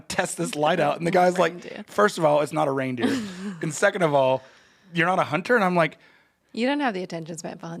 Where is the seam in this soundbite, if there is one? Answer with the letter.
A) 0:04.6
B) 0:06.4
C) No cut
B